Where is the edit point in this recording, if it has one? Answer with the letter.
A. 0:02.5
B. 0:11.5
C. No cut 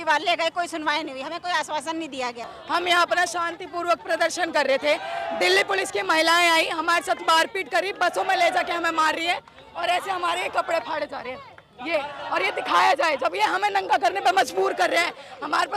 A